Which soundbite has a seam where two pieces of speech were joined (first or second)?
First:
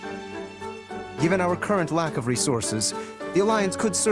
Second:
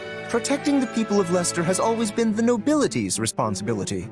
first